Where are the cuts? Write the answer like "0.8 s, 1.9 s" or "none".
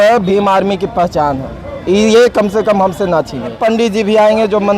3.6 s